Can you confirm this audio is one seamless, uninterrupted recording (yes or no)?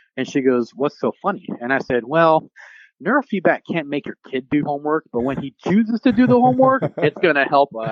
yes